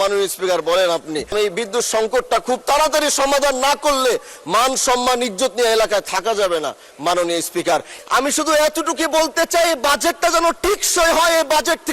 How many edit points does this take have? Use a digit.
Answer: 2